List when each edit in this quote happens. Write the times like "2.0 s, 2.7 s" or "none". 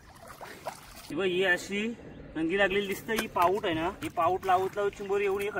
0.9 s, 4.0 s